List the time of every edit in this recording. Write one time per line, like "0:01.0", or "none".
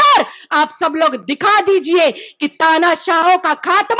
none

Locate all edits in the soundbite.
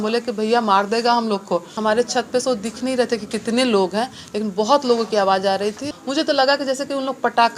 0:01.7
0:05.9

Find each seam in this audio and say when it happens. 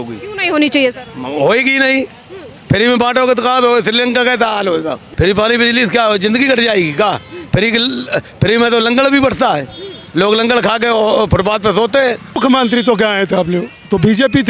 0:05.0
0:12.4

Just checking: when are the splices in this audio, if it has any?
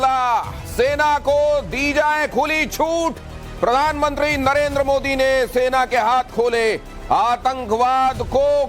0:00.9

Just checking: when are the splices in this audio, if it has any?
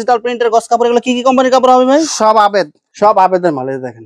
0:02.8

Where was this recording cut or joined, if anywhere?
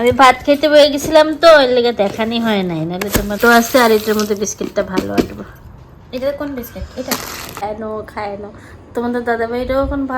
0:03.4
0:07.6

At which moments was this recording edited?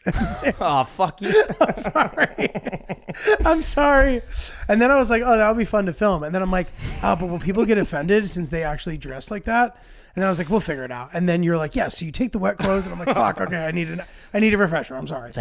none

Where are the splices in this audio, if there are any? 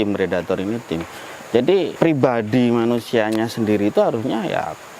0:01.9

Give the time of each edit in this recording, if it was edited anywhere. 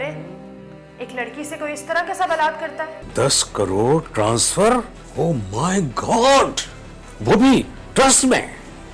0:03.0

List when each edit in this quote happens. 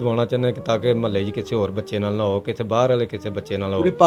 none

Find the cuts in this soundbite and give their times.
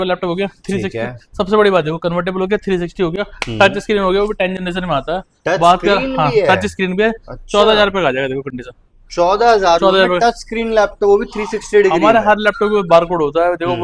none

